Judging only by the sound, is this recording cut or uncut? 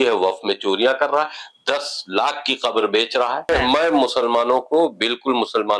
cut